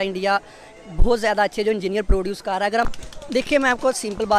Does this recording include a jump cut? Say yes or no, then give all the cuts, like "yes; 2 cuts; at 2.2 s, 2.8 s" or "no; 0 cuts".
yes; 1 cut; at 2.9 s